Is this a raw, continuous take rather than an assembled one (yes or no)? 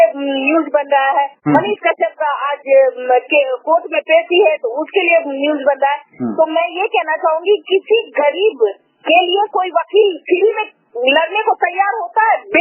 yes